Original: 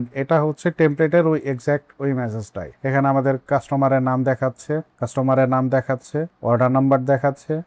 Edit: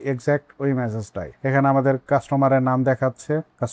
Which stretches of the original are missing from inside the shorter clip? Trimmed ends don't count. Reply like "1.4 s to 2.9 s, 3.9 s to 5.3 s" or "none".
none